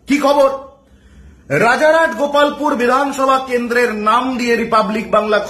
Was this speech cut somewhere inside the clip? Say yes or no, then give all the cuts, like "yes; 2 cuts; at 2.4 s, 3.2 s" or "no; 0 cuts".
no; 0 cuts